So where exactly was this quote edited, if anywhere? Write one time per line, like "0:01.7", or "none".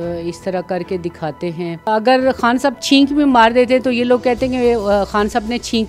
0:01.9